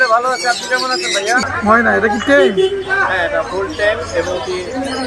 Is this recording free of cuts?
no; 1 cut; at 1.4 s

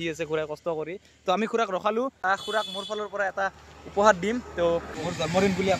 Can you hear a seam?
yes; 2 cuts; at 2.2 s, 4.8 s

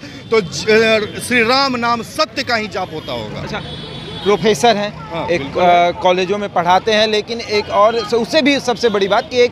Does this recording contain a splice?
no; 0 cuts

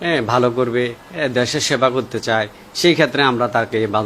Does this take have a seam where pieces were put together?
no; 0 cuts

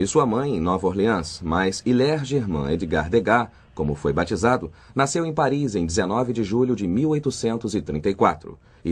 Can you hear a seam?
no; 0 cuts

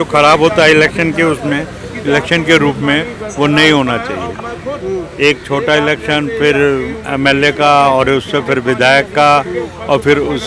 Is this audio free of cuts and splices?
yes; 0 cuts

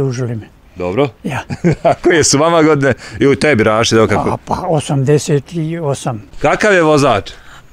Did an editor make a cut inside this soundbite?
yes; 1 cut; at 6.3 s

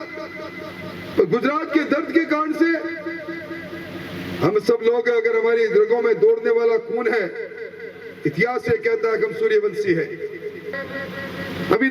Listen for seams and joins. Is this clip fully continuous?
no; 1 cut; at 10.8 s

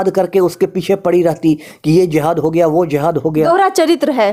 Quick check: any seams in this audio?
no; 0 cuts

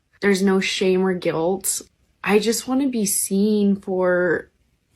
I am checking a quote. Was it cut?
no; 0 cuts

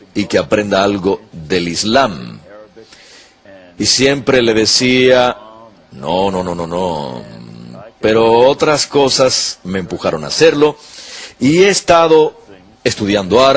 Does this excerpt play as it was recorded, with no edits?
yes; 0 cuts

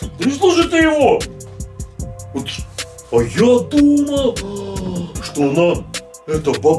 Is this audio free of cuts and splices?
yes; 0 cuts

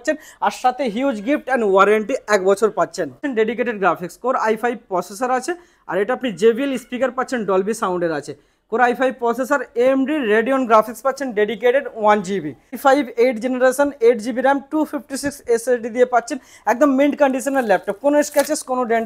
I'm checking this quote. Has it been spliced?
yes; 2 cuts; at 3.2 s, 12.8 s

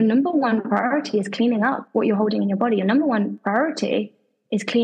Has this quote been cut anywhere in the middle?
yes; 2 cuts; at 1.8 s, 3.4 s

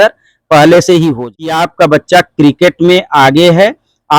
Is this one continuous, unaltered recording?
no; 1 cut; at 1.6 s

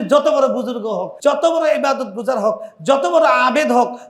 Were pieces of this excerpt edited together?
yes; 1 cut; at 1.1 s

